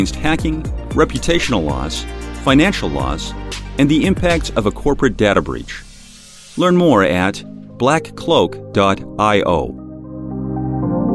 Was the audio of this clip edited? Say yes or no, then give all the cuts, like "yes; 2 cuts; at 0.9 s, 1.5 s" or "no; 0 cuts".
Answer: yes; 1 cut; at 10.2 s